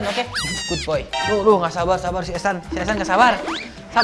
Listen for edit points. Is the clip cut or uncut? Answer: cut